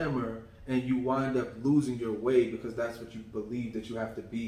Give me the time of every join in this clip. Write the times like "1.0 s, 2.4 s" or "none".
none